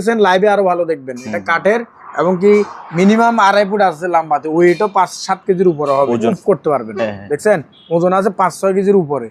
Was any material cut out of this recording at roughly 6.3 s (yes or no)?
yes